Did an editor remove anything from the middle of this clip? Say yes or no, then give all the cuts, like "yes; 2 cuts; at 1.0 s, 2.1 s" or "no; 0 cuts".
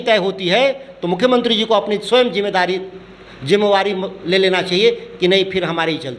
no; 0 cuts